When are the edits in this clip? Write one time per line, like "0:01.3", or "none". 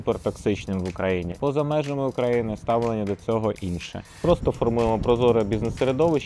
0:01.3
0:04.2